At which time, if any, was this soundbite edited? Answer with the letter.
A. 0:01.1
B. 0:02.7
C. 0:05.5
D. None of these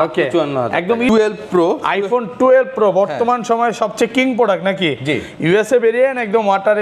A